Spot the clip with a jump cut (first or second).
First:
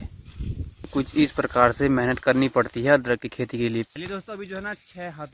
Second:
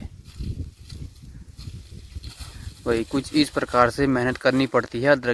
first